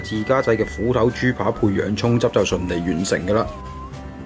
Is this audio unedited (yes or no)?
yes